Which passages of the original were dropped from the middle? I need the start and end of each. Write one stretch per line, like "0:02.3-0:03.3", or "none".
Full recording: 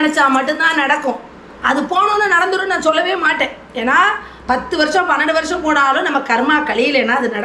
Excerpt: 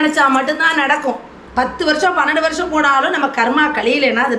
0:01.4-0:04.3